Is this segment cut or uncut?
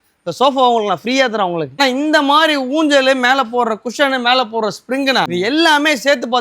cut